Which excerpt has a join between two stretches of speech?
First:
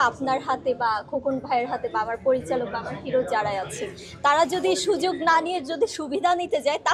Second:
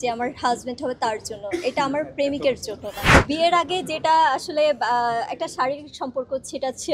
second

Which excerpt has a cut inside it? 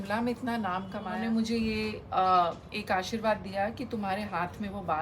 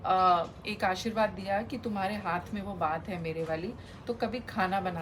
first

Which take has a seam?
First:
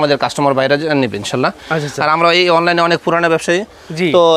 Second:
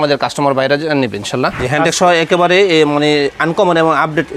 second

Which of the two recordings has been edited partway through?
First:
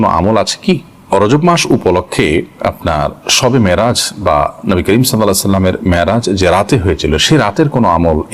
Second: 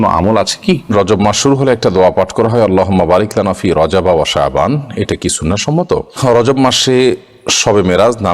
second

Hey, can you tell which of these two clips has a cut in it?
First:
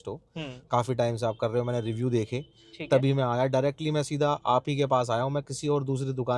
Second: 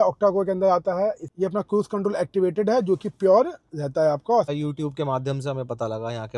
second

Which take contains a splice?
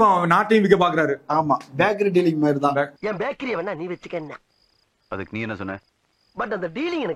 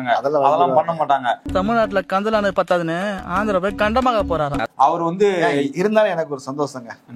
second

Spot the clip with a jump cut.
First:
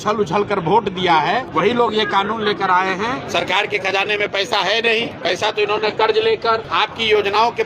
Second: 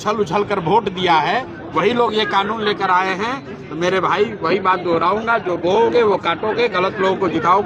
first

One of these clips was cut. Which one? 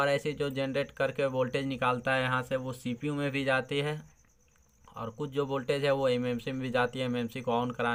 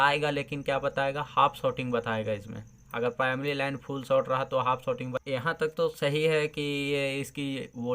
second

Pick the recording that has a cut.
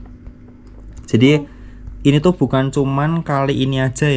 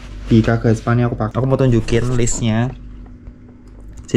second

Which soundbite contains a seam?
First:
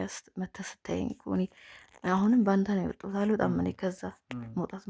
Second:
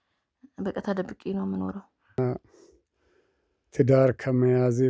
second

